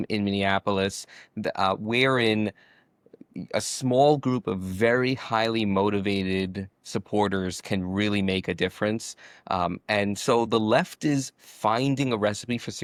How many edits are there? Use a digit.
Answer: 0